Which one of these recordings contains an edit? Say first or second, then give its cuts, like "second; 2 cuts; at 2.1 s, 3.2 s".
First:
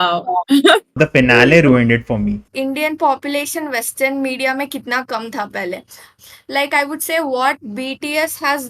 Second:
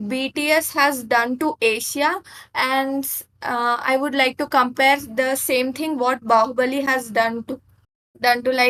first; 3 cuts; at 0.9 s, 2.5 s, 6.2 s